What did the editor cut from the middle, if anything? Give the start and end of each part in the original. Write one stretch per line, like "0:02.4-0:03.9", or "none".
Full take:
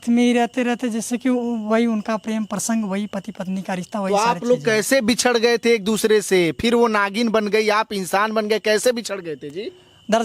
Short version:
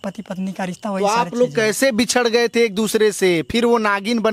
none